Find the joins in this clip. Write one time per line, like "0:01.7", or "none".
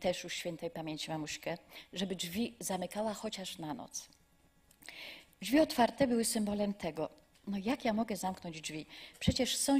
none